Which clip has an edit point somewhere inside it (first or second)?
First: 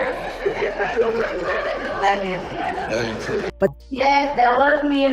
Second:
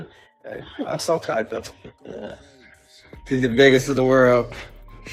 first